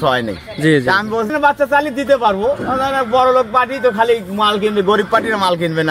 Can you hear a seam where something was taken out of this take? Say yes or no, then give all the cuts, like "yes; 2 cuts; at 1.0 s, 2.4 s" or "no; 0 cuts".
yes; 1 cut; at 1.3 s